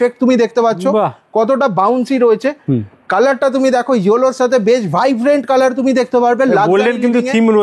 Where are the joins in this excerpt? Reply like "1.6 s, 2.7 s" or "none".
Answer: none